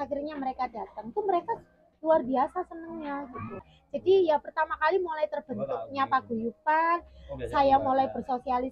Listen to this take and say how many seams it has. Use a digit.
1